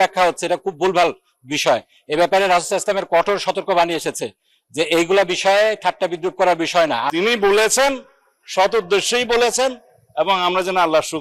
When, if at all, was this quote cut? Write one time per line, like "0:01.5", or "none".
0:07.1